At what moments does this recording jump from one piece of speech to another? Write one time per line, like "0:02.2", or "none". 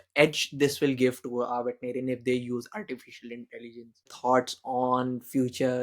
0:04.1